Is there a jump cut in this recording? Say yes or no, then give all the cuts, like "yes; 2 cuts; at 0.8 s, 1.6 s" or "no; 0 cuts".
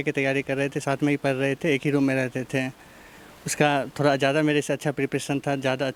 no; 0 cuts